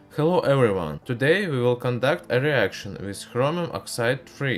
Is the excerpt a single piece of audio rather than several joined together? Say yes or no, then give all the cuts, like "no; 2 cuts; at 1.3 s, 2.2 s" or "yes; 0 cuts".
yes; 0 cuts